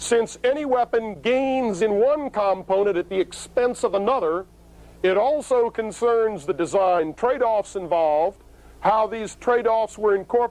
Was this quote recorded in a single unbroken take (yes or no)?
yes